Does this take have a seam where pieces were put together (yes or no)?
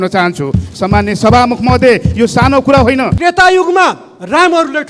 yes